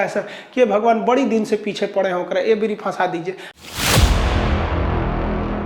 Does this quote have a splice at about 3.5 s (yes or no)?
yes